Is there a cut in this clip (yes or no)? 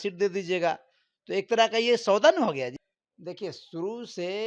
yes